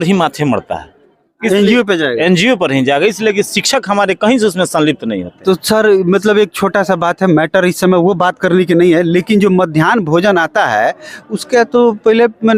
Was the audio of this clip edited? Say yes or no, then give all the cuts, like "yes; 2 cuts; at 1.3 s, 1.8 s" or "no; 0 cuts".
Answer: no; 0 cuts